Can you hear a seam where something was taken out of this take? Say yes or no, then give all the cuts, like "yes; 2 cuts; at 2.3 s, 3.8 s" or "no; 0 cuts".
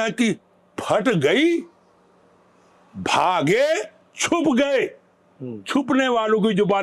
no; 0 cuts